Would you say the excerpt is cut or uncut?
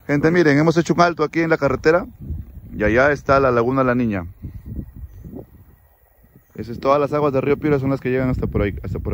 uncut